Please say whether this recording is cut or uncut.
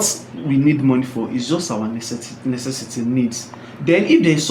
uncut